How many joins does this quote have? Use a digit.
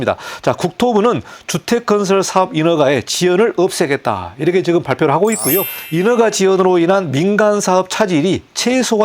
1